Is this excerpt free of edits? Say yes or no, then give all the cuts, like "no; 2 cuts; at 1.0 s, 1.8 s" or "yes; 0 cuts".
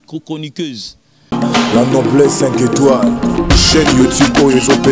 no; 1 cut; at 1.2 s